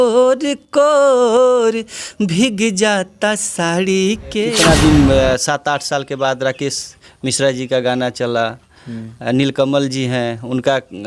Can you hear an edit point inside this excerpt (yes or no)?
yes